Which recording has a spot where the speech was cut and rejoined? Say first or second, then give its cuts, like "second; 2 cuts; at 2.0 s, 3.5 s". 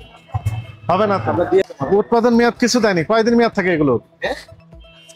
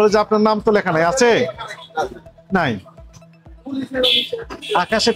first; 1 cut; at 1.6 s